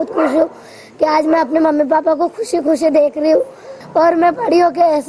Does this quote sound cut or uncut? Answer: cut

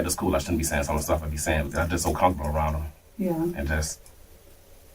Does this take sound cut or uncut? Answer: uncut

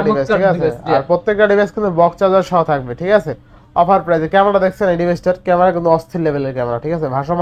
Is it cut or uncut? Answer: uncut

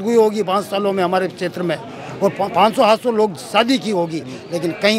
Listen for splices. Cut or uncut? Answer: uncut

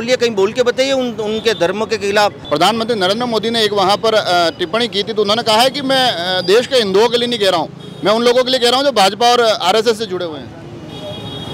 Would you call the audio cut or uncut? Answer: cut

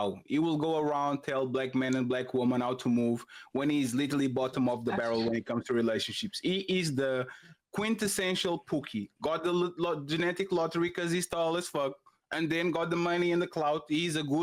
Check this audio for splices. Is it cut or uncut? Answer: uncut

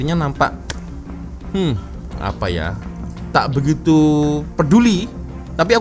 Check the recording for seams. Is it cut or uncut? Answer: uncut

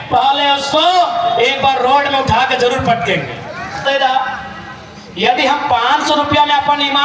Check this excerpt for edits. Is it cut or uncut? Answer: cut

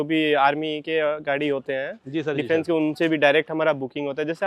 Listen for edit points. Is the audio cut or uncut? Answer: uncut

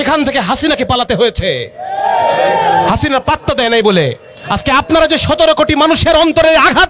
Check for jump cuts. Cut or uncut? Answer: uncut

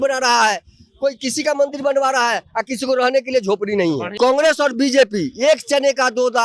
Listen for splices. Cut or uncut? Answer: cut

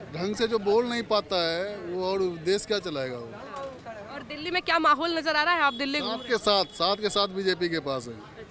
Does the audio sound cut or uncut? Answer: uncut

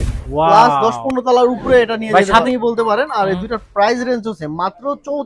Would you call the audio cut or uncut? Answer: cut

